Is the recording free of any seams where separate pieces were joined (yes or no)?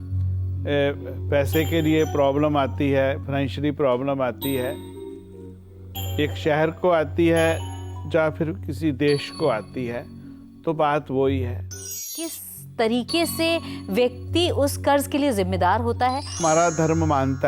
no